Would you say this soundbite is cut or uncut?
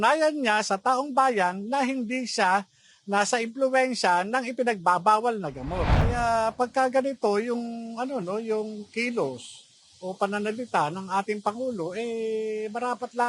cut